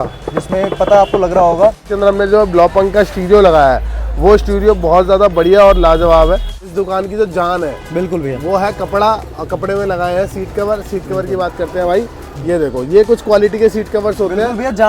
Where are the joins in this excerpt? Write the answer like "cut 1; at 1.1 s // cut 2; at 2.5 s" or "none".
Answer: cut 1; at 1.8 s // cut 2; at 6.6 s